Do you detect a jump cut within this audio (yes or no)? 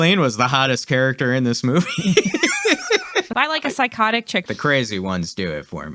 yes